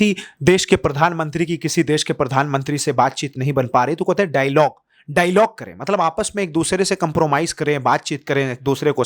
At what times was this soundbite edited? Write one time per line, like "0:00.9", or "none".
none